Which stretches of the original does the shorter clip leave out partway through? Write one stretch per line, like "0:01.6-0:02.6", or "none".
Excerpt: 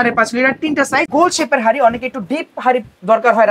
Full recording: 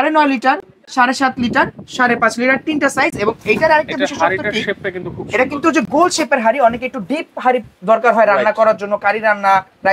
0:03.1-0:05.9